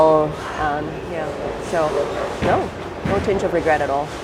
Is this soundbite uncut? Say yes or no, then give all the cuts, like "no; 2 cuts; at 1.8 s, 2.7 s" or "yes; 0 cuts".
yes; 0 cuts